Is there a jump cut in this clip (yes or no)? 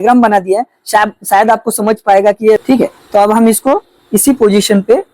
yes